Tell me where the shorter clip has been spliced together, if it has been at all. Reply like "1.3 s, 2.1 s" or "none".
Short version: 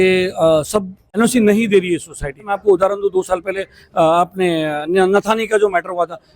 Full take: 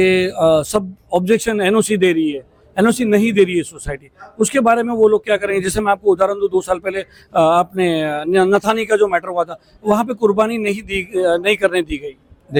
1.0 s, 2.5 s

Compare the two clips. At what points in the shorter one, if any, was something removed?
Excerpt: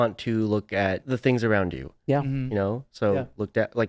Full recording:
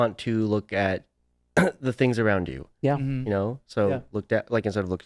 1.1 s

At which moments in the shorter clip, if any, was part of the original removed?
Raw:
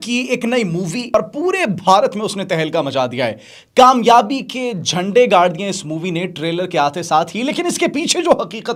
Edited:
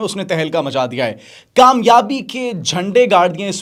none

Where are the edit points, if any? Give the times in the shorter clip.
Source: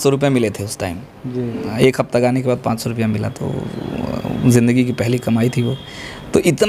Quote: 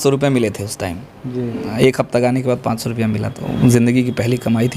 3.4 s

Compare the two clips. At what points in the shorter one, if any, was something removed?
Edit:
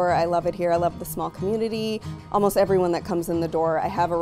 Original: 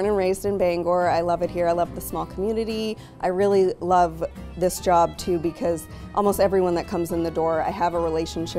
2.1 s

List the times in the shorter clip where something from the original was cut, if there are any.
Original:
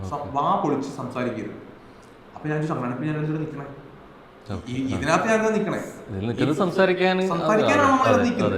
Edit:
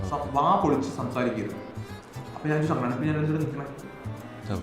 none

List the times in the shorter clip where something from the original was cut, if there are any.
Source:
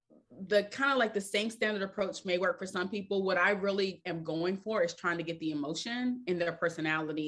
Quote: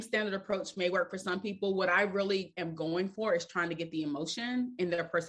none

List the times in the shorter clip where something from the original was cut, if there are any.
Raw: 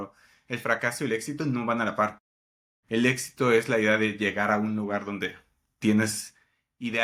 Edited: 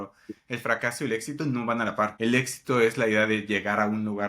2.1 s

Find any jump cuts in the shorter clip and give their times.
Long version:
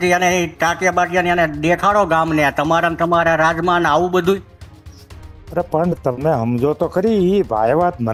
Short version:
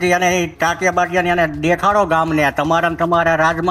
none

